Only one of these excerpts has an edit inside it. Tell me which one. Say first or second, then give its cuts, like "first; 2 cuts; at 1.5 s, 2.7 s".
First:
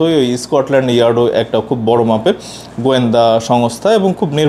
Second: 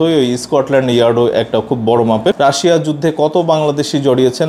second; 1 cut; at 2.4 s